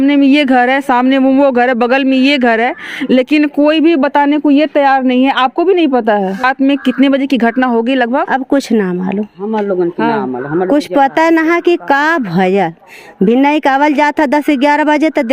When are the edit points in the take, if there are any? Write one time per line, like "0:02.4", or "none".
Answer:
0:06.4